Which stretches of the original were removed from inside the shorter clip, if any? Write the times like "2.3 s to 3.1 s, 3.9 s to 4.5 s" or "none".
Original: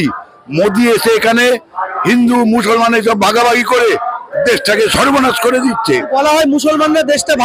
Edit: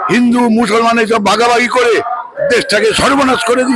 none